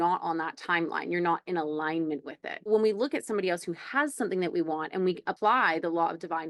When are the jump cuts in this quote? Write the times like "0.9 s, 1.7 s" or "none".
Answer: 2.7 s, 5.3 s